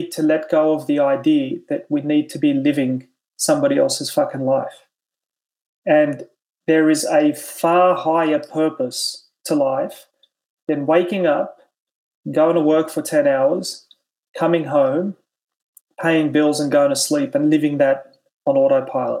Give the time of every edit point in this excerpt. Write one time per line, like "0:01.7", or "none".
none